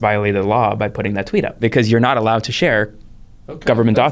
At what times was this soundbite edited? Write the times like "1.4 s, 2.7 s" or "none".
1.6 s